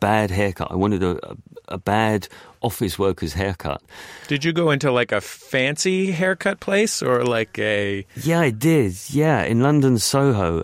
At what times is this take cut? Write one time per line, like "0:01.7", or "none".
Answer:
0:08.1